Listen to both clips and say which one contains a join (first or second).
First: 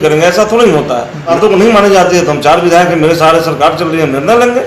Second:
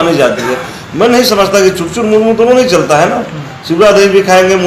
first